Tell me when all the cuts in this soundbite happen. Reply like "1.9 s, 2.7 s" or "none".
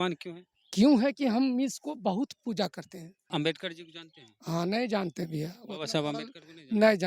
3.3 s